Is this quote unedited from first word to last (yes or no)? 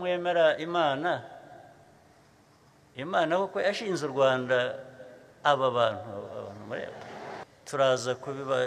no